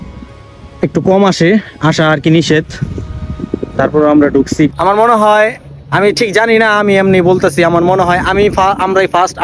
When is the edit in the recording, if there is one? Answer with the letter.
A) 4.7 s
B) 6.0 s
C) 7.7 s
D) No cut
A